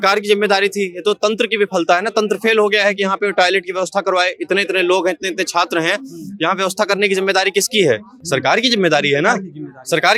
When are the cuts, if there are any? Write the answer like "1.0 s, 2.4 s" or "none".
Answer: none

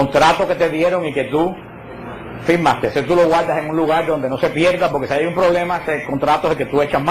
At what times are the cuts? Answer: none

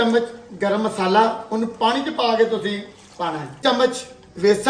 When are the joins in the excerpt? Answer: 3.5 s

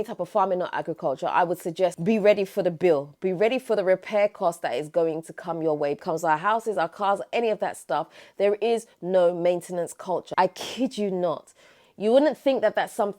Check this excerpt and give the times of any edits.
2.0 s, 6.0 s, 10.3 s

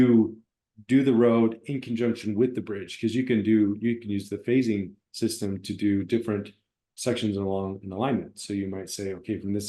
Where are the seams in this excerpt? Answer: none

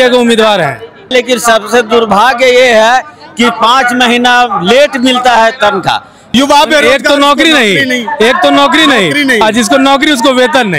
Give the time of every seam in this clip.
1.1 s, 6.2 s

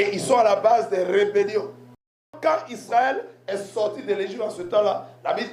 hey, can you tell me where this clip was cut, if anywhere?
2.4 s

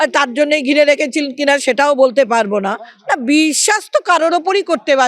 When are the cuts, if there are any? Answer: 2.9 s

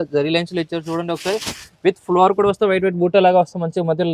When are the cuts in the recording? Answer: none

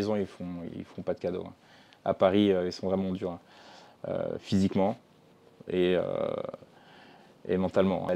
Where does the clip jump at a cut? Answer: none

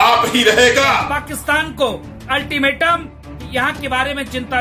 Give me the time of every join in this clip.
1.1 s

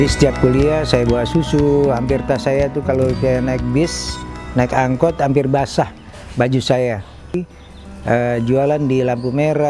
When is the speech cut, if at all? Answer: 7.3 s

